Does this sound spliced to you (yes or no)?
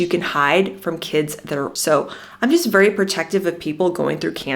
yes